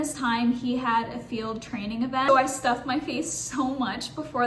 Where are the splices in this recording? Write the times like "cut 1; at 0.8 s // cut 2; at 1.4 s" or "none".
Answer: cut 1; at 2.3 s